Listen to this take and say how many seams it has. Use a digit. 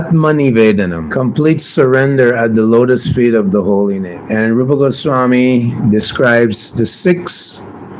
1